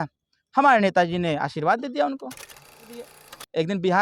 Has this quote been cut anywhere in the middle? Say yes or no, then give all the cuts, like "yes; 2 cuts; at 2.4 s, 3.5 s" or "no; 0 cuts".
yes; 1 cut; at 2.9 s